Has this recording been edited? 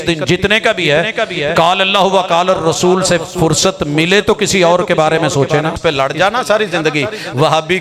yes; 1 cut; at 5.8 s

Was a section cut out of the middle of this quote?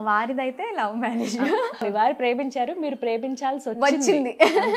yes; 1 cut; at 1.8 s

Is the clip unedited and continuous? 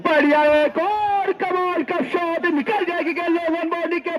yes; 0 cuts

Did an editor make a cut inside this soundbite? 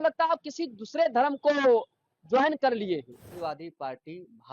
yes; 1 cut; at 3.3 s

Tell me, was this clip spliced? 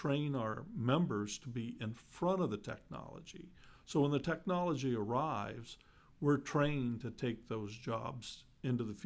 no; 0 cuts

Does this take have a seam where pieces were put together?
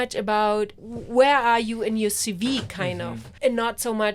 yes; 1 cut; at 3.2 s

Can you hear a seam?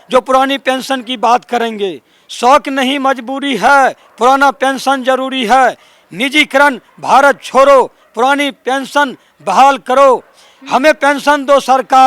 no; 0 cuts

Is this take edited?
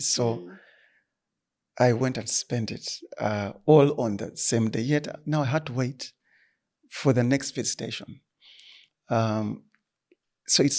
no; 0 cuts

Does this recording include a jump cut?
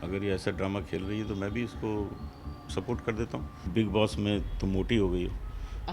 yes; 1 cut; at 3.7 s

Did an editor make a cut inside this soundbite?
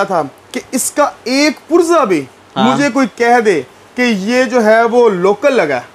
no; 0 cuts

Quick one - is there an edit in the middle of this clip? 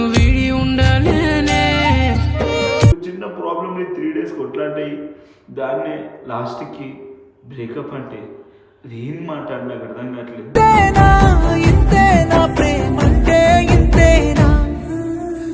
yes; 1 cut; at 2.9 s

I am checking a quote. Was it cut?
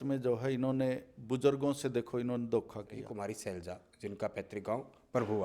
yes; 1 cut; at 3.0 s

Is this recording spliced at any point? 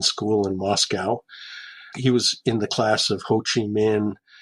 yes; 1 cut; at 1.9 s

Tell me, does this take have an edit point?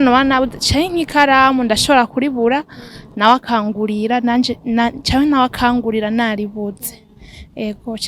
no; 0 cuts

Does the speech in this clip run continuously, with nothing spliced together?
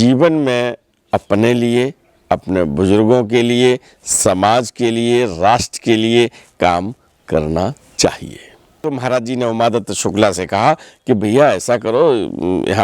no; 1 cut; at 8.8 s

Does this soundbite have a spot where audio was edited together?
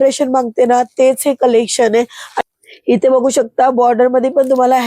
yes; 1 cut; at 2.5 s

